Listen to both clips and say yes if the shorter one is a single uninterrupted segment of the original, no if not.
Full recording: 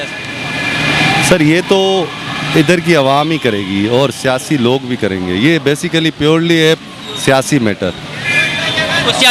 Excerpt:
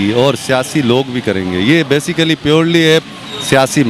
yes